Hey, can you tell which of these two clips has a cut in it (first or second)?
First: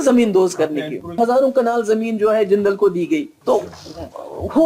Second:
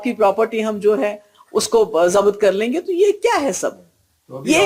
first